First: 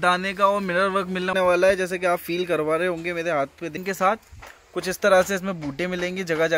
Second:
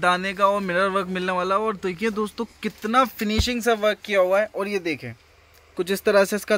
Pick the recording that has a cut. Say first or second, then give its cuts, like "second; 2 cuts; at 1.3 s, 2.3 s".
first; 2 cuts; at 1.3 s, 3.8 s